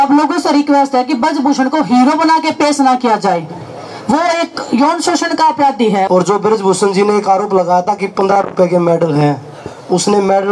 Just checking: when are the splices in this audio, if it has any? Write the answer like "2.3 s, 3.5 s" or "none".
6.1 s